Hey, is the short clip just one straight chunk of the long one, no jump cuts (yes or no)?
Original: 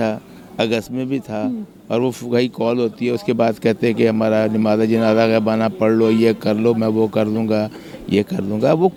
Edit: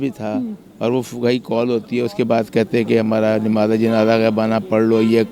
yes